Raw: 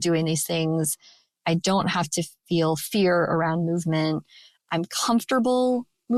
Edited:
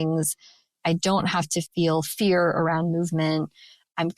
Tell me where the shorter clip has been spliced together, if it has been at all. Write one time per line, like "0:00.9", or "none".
0:01.7